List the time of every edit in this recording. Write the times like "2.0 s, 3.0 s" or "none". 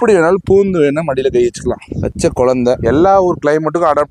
none